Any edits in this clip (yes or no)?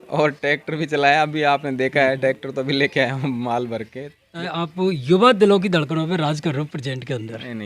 yes